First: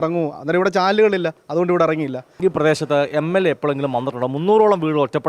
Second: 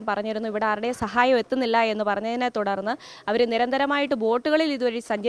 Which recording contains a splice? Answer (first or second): first